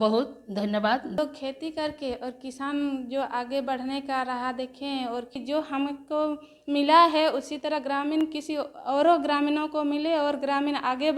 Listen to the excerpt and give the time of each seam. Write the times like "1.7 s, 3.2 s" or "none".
1.2 s, 5.3 s